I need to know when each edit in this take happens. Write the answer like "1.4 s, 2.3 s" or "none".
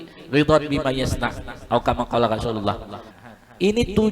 3.1 s